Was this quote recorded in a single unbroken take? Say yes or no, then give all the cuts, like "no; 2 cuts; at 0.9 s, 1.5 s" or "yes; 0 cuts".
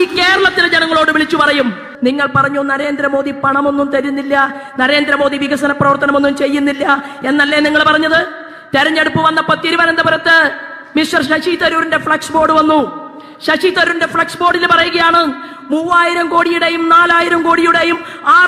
no; 1 cut; at 1.9 s